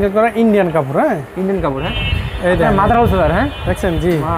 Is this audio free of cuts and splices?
no; 1 cut; at 1.9 s

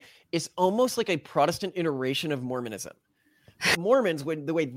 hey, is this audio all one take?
no; 1 cut; at 3.8 s

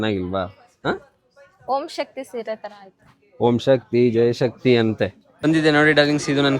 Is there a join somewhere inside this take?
yes; 1 cut; at 5.2 s

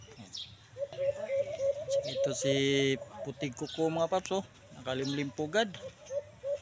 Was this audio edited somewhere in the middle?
yes; 1 cut; at 0.9 s

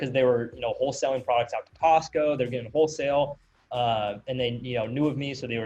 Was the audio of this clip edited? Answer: no; 0 cuts

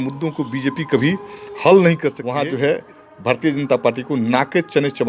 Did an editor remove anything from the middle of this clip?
yes; 1 cut; at 2.2 s

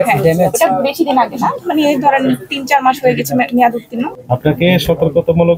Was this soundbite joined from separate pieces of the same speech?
yes; 1 cut; at 4.1 s

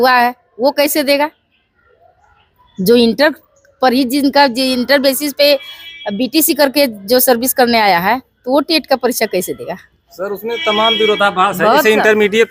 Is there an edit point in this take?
no; 0 cuts

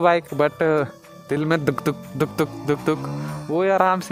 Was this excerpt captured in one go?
yes; 0 cuts

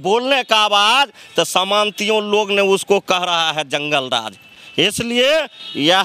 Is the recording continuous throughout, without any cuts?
yes; 0 cuts

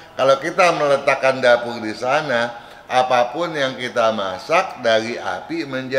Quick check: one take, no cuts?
yes; 0 cuts

